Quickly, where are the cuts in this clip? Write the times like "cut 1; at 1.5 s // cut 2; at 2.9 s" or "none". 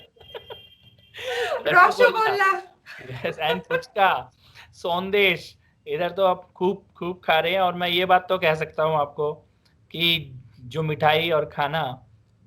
none